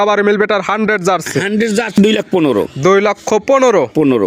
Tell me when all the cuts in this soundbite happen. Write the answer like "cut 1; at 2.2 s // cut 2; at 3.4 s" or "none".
cut 1; at 1.9 s